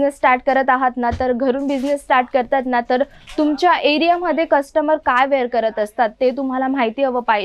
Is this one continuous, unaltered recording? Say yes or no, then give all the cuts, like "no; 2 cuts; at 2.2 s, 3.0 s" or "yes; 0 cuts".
yes; 0 cuts